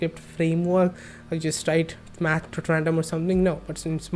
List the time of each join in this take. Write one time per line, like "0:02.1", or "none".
0:01.1

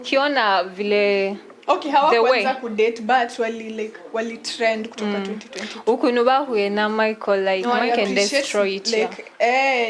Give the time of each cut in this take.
0:07.6

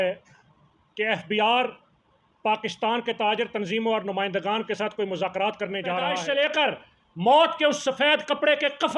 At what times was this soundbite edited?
0:06.2

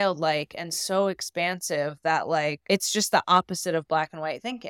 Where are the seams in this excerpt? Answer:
0:02.6

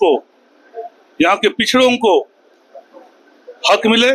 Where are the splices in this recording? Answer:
none

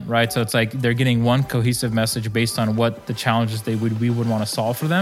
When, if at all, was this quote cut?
none

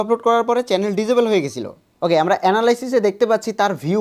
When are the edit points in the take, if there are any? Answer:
0:01.8

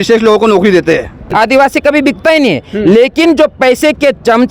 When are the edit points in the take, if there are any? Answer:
0:01.2

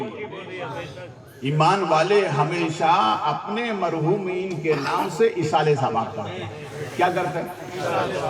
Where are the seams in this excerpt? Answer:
none

